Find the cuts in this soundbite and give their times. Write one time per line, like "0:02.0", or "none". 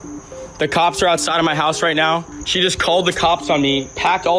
0:02.4